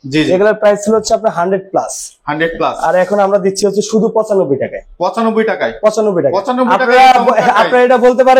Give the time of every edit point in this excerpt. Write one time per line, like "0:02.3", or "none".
none